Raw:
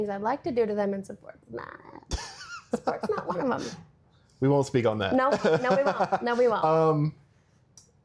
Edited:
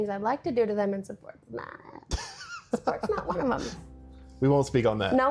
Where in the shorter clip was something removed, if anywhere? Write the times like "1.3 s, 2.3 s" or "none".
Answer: none